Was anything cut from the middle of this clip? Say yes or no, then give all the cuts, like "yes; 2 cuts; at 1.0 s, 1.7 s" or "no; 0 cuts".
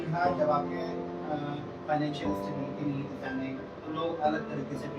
yes; 1 cut; at 3.7 s